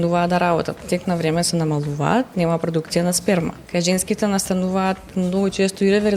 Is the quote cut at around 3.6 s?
yes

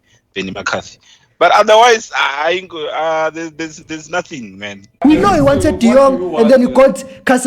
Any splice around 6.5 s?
no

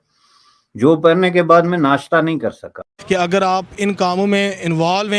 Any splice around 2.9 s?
yes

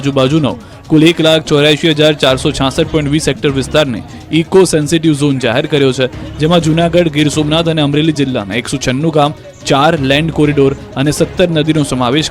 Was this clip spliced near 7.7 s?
no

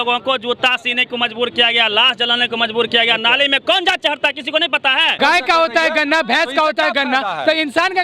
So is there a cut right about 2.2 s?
no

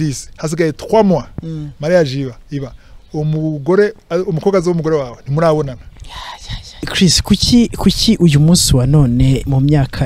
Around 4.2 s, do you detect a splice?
no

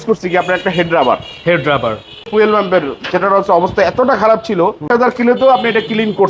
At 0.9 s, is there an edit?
no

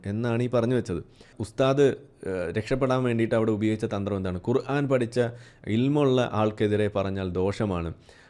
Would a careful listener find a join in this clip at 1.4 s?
yes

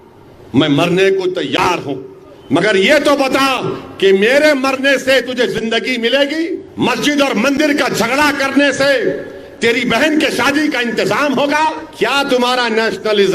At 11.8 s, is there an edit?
yes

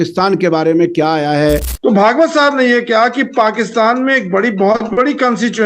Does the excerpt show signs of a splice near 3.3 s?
no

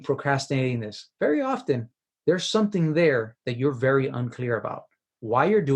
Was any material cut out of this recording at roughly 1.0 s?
yes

